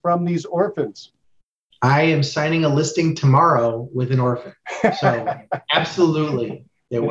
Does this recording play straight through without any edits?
yes; 0 cuts

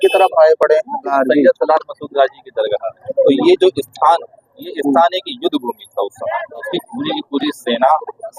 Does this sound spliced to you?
yes; 3 cuts; at 1.1 s, 3.0 s, 6.7 s

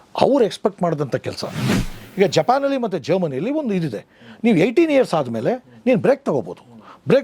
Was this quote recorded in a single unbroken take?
no; 1 cut; at 1.9 s

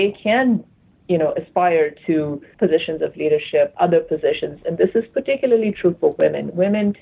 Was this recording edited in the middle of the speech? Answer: yes; 2 cuts; at 2.5 s, 3.7 s

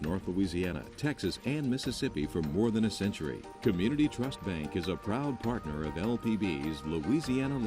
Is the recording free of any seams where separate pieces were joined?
yes; 0 cuts

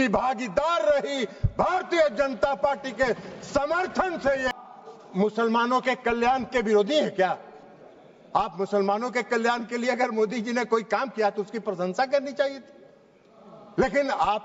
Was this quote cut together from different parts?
yes; 1 cut; at 4.6 s

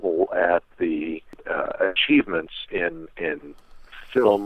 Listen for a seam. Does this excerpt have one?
yes; 1 cut; at 1.4 s

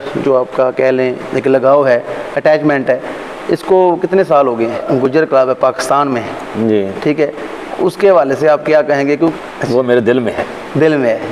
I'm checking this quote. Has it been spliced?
yes; 2 cuts; at 4.8 s, 9.3 s

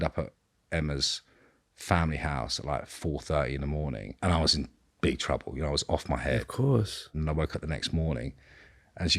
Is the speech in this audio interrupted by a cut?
yes; 2 cuts; at 4.1 s, 7.1 s

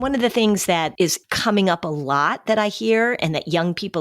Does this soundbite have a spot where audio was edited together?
yes; 1 cut; at 0.9 s

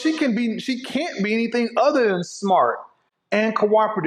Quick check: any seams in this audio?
no; 0 cuts

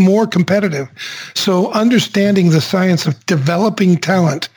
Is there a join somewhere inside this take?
yes; 1 cut; at 2.7 s

